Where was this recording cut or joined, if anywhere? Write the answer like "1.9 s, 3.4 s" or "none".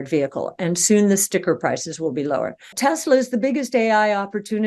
2.6 s